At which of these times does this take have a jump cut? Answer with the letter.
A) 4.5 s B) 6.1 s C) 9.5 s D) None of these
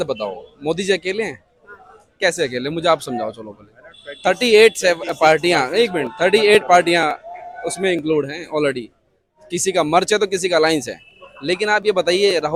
D